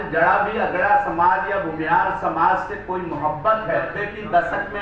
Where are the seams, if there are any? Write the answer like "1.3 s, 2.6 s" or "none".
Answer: 3.8 s